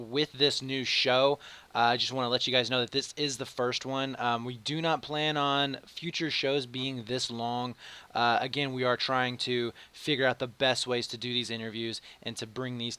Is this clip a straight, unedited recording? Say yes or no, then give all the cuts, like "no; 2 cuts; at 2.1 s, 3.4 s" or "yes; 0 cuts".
yes; 0 cuts